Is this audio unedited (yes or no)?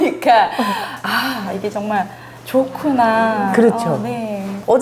yes